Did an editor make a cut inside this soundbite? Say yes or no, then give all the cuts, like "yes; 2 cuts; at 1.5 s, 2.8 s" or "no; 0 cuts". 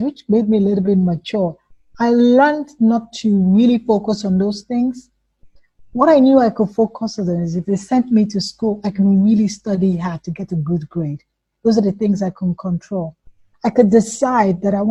no; 0 cuts